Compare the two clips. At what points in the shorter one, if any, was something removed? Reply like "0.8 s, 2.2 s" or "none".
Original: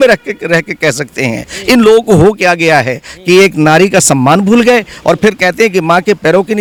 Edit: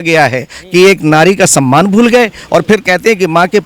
none

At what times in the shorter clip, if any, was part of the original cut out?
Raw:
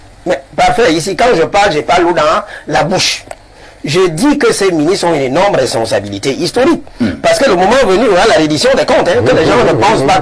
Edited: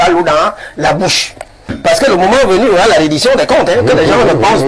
1.8 s

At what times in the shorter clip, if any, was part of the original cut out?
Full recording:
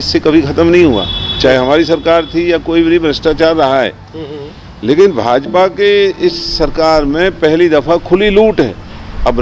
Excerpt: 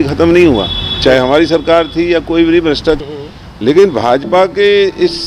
3.0 s

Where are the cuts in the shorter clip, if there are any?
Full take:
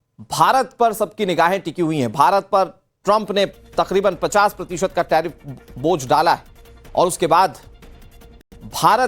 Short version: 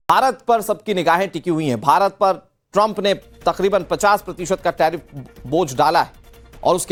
none

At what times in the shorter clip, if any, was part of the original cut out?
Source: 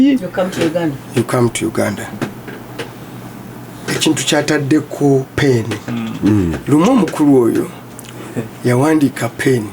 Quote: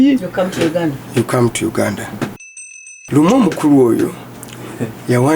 3.0 s

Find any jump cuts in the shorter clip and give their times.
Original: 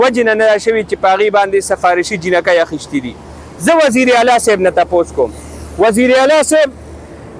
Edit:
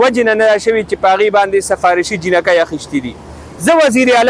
none

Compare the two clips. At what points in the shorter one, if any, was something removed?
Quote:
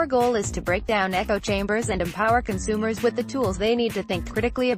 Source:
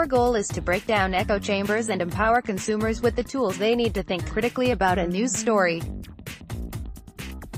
none

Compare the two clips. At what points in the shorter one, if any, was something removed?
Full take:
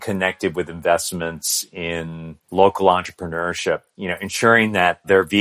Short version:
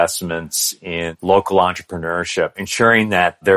1.1 s, 2.6 s

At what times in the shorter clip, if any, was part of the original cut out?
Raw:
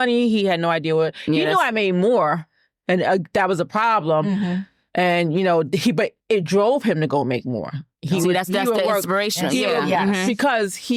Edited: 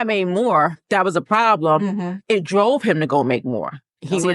0.8 s, 2.2 s

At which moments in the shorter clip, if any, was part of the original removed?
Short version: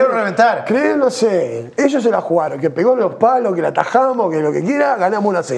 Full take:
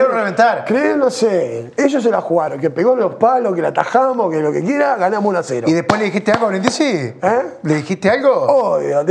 none

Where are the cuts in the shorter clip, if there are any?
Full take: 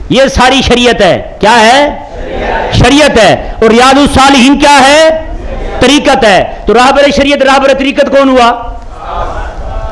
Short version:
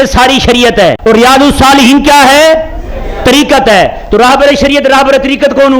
1.0 s

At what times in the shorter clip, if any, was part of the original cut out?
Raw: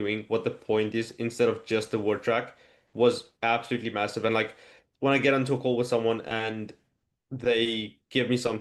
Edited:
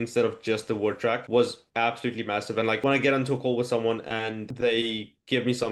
1.2 s, 2.8 s, 4.5 s

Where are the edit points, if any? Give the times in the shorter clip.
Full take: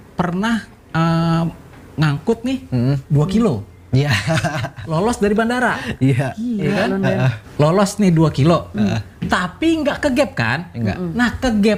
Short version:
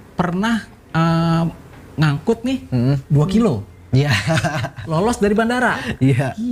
none

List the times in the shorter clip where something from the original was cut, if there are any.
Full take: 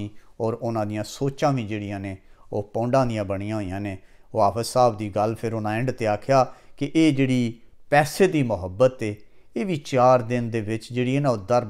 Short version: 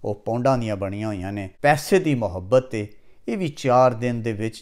1.4 s

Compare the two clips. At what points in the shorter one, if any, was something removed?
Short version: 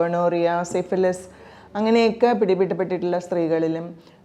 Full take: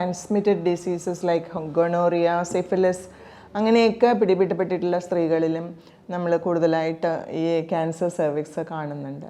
none

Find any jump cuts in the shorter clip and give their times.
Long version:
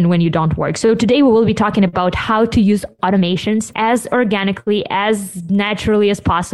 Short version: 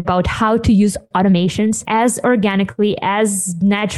none

